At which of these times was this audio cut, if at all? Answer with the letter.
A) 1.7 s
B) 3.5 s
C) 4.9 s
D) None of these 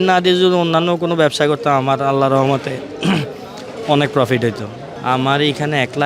C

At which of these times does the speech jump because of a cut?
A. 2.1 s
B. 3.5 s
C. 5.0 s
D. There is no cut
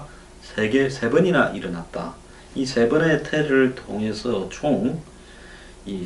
B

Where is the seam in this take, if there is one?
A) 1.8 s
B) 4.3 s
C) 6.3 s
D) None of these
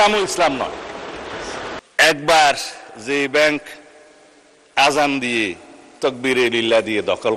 A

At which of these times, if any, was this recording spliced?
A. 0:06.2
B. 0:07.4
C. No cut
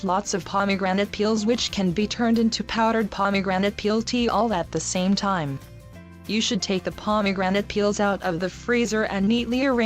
B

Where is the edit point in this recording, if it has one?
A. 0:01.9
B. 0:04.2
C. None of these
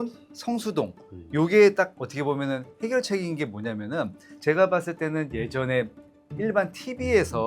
B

